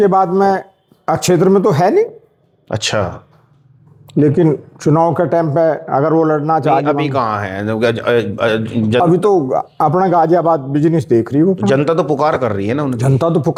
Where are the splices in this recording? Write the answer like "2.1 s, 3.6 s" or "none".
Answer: none